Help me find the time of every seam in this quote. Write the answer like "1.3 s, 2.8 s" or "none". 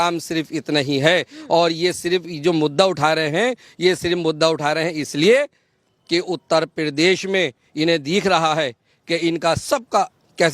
none